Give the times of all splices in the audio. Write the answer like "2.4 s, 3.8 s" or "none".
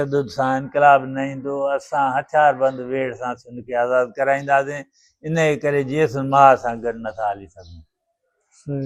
none